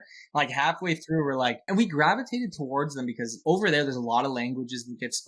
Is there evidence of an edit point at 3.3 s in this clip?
yes; 2 cuts; at 1.6 s, 3.3 s

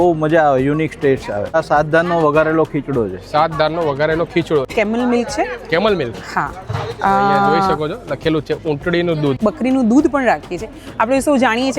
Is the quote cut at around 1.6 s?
yes; 3 cuts; at 1.6 s, 4.7 s, 9.4 s

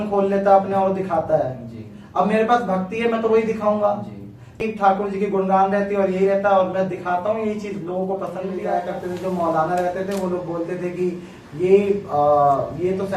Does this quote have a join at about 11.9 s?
no; 2 cuts; at 4.7 s, 8.6 s

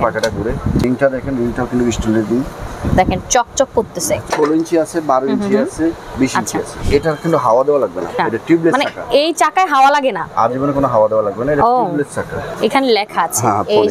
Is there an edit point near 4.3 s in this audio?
yes; 6 cuts; at 0.8 s, 2.7 s, 4.3 s, 6.8 s, 8.1 s, 12.4 s

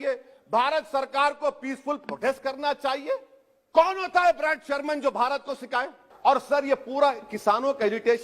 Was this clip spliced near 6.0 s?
yes; 1 cut; at 6.0 s

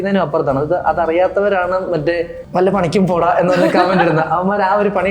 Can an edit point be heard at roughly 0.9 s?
no; 1 cut; at 2.4 s

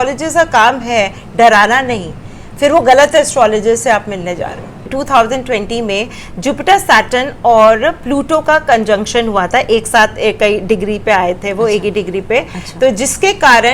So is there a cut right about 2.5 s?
no; 1 cut; at 4.9 s

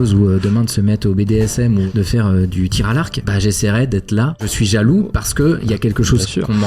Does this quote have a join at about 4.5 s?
yes; 3 cuts; at 1.9 s, 3.2 s, 4.5 s

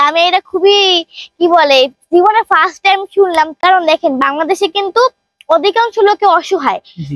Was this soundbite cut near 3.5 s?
yes; 1 cut; at 3.5 s

